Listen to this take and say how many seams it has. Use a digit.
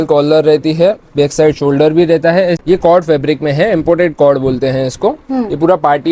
1